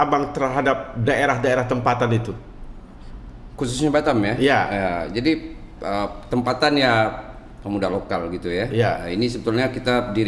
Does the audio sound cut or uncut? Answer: uncut